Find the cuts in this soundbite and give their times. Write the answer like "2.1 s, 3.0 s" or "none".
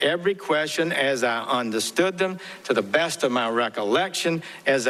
none

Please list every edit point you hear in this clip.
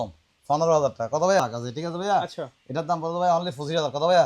1.4 s

